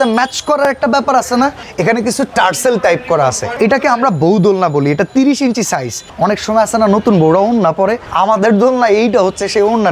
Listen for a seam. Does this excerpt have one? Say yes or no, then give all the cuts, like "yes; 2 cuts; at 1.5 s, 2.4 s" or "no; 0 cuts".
yes; 4 cuts; at 1.7 s, 3.5 s, 6.0 s, 8.0 s